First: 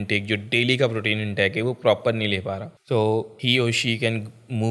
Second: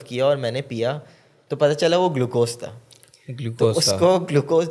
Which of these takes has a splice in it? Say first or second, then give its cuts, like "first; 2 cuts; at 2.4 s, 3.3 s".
first; 2 cuts; at 2.7 s, 3.3 s